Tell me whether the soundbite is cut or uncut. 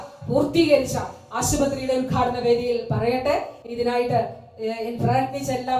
uncut